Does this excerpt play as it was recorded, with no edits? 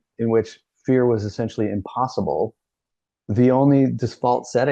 yes; 0 cuts

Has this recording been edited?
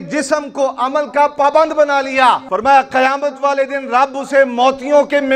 yes; 1 cut; at 2.5 s

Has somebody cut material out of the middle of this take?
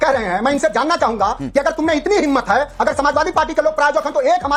no; 0 cuts

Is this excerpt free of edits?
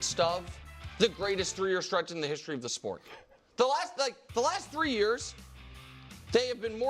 no; 1 cut; at 3.4 s

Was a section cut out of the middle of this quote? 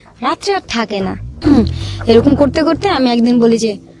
yes; 1 cut; at 1.3 s

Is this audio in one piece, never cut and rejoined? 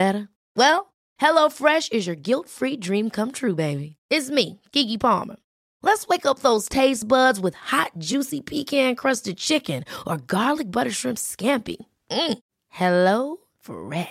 yes; 0 cuts

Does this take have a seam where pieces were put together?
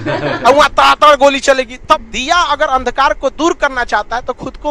yes; 1 cut; at 1.8 s

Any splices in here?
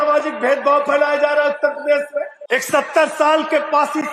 yes; 1 cut; at 2.4 s

